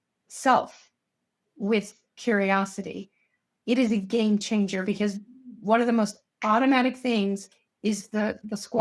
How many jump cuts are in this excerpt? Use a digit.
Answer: 1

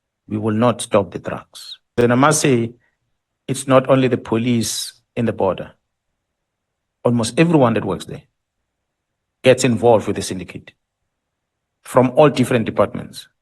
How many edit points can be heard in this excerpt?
1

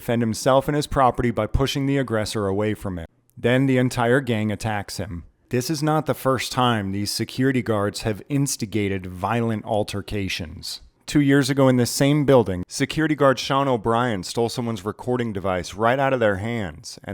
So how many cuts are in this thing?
1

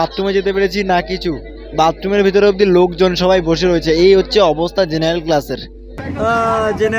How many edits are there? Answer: 0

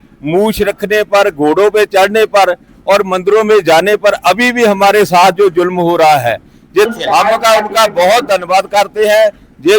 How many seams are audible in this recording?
1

